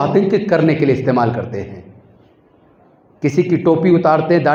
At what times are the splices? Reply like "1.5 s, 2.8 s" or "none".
none